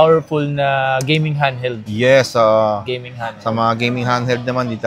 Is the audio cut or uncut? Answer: uncut